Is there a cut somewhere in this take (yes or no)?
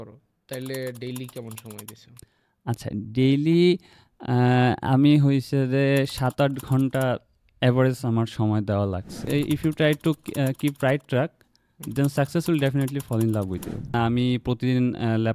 yes